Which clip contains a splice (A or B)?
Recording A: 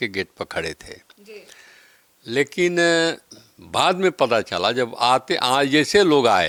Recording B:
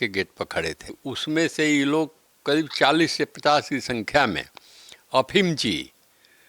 B